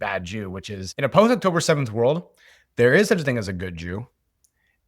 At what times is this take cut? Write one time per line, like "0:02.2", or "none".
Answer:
0:01.0